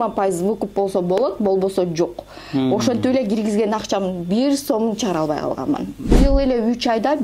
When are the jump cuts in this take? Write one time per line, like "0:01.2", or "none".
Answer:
0:06.1